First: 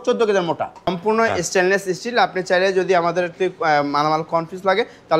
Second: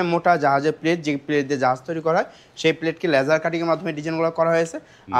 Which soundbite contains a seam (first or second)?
first